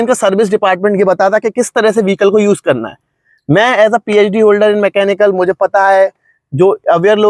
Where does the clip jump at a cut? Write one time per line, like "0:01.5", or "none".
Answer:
none